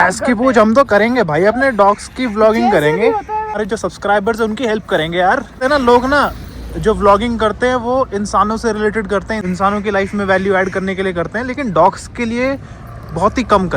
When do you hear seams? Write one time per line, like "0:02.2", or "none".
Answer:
0:03.6
0:05.6
0:09.4